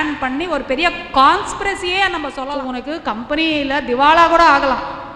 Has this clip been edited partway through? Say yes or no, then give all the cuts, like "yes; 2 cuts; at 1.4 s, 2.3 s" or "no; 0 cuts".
yes; 1 cut; at 2.5 s